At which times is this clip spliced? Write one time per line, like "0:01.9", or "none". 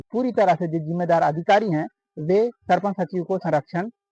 none